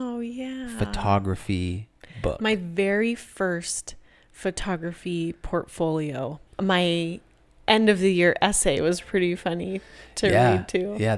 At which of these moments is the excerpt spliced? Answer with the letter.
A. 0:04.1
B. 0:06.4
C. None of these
B